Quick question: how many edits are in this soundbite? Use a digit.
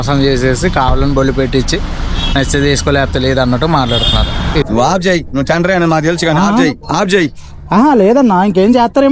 1